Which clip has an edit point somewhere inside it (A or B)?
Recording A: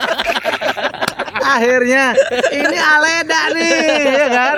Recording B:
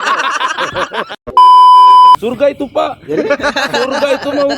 B